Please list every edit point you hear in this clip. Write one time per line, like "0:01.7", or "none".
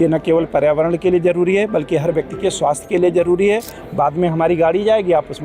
0:03.8